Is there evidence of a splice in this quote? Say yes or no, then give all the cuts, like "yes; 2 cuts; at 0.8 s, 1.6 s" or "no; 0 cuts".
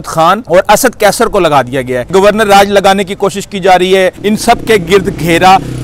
yes; 2 cuts; at 2.1 s, 4.2 s